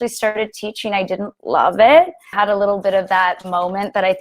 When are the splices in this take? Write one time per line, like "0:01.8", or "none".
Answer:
0:02.2